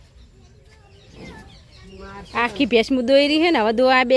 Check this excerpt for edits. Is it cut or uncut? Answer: cut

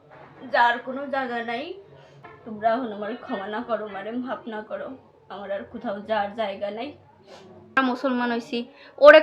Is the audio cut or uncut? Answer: cut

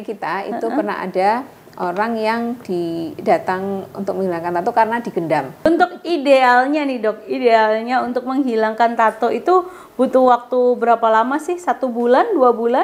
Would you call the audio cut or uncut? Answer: cut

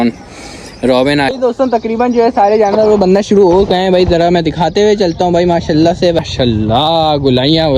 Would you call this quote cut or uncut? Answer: cut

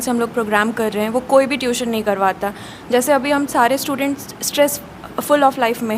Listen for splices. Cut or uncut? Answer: uncut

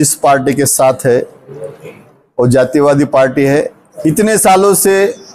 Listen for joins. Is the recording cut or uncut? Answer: cut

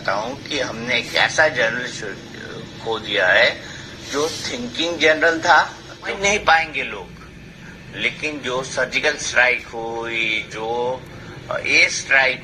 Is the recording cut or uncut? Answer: cut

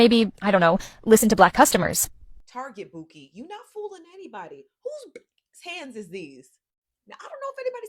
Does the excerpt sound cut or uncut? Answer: cut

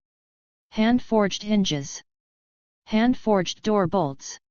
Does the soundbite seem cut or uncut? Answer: uncut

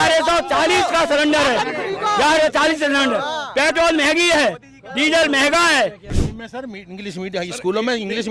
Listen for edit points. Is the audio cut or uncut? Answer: cut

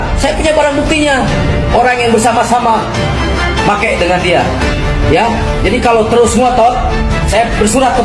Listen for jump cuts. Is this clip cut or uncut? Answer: uncut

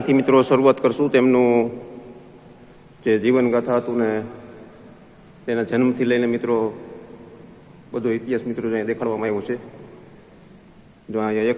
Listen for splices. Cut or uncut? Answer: uncut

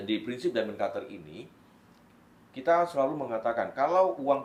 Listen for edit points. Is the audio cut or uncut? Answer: uncut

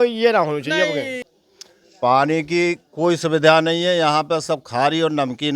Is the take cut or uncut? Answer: cut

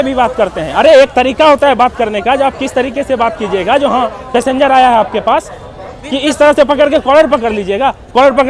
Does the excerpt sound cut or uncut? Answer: uncut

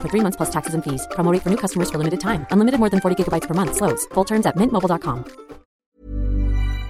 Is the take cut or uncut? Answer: cut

